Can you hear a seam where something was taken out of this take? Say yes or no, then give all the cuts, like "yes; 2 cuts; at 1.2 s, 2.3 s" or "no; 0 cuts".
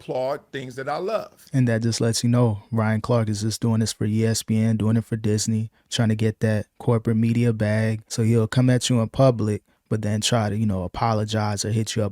yes; 2 cuts; at 1.4 s, 8.0 s